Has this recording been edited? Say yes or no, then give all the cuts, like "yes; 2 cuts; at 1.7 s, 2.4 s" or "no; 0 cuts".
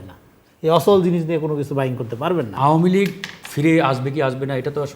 yes; 1 cut; at 2.5 s